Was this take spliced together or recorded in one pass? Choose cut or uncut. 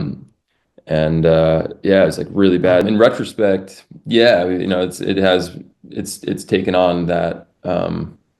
cut